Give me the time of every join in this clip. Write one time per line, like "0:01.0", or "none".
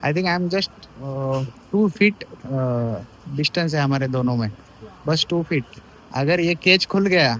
none